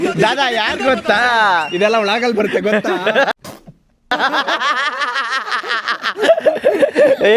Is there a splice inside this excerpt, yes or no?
no